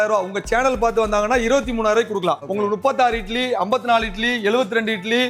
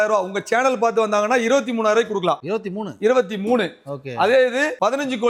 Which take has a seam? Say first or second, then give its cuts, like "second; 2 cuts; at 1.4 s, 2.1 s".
first; 1 cut; at 2.4 s